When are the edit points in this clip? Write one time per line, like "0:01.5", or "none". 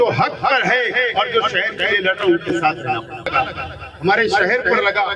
0:03.3